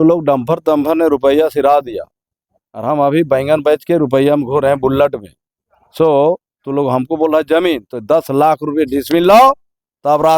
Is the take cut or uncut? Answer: uncut